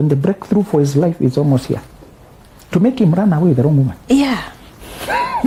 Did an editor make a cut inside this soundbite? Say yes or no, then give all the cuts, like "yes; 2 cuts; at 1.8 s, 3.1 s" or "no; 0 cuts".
no; 0 cuts